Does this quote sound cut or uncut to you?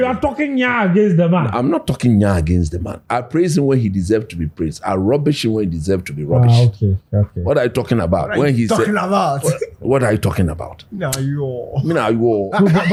uncut